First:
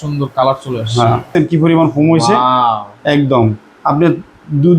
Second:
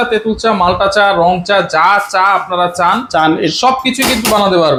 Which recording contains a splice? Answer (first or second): first